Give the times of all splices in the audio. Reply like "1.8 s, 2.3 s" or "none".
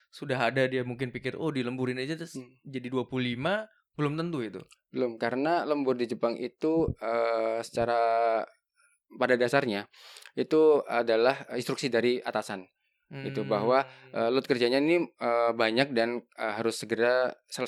none